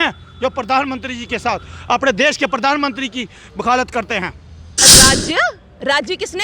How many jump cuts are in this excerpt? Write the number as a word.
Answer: one